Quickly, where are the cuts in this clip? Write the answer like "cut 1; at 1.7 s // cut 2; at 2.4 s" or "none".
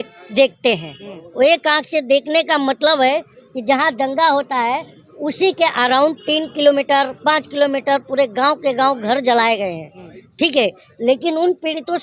none